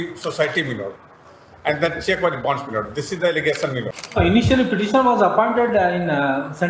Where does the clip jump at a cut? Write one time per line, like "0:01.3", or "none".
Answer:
0:04.0